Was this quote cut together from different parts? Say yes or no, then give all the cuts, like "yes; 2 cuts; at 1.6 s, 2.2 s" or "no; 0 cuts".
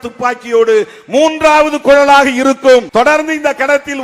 yes; 1 cut; at 2.9 s